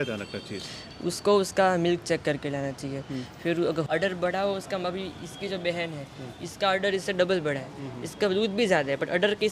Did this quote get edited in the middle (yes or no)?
yes